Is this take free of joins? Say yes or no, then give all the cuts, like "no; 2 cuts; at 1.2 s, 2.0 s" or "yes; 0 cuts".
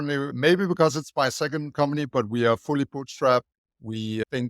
no; 1 cut; at 2.1 s